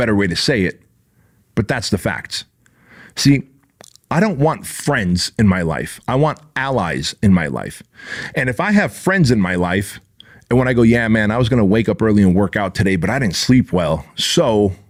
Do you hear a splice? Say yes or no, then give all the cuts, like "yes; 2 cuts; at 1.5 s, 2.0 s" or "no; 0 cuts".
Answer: no; 0 cuts